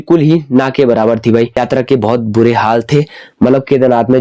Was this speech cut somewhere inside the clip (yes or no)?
yes